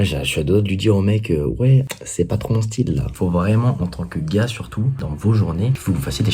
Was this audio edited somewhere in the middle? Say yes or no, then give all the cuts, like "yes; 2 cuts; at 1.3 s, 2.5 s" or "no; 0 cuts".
yes; 3 cuts; at 2.0 s, 3.1 s, 5.0 s